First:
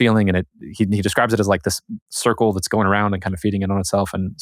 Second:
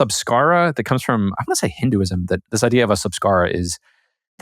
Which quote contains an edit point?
second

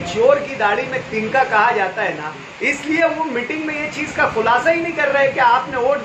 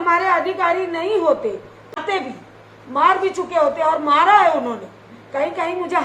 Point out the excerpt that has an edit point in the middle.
second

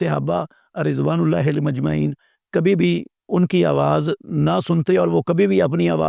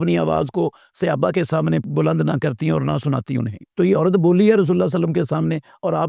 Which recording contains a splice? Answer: second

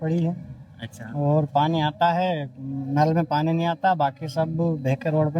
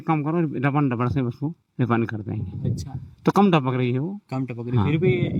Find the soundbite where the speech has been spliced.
first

